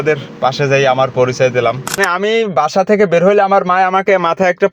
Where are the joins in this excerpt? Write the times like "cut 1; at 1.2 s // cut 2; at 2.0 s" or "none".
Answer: cut 1; at 1.9 s

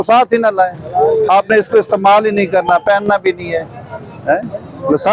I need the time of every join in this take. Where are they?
none

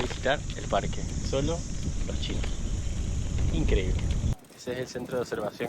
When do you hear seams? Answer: cut 1; at 4.4 s

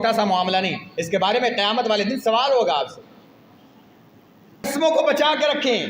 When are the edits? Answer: cut 1; at 4.6 s

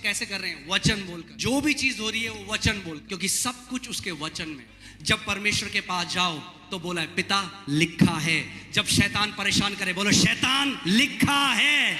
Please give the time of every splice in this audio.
cut 1; at 1.3 s // cut 2; at 3.0 s // cut 3; at 4.7 s

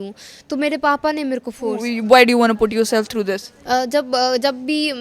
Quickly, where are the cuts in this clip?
cut 1; at 1.9 s

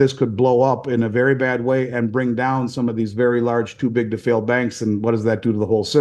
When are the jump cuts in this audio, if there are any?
none

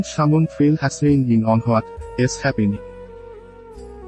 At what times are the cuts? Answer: cut 1; at 2.8 s

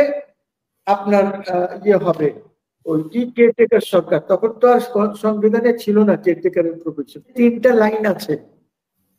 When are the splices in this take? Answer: cut 1; at 7.3 s

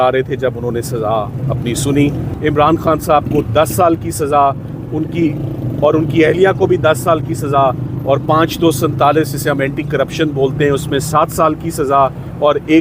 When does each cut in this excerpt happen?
cut 1; at 2.3 s

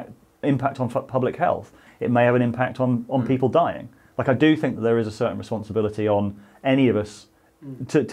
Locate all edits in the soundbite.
cut 1; at 1.9 s

